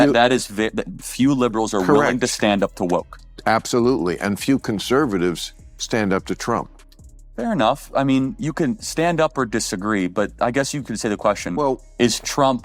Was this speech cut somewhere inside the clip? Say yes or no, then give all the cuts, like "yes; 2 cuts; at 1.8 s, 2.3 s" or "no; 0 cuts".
no; 0 cuts